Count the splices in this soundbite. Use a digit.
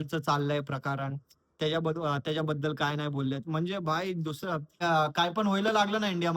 1